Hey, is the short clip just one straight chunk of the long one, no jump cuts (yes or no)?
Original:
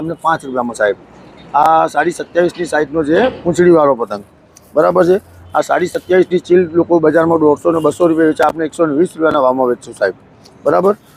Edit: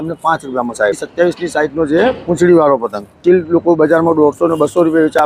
no